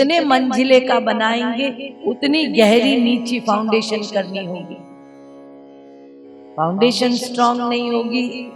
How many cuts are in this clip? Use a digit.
0